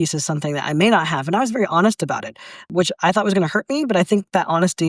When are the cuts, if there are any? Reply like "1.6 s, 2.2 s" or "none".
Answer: 2.6 s